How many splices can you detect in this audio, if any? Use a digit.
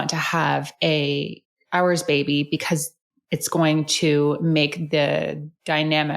0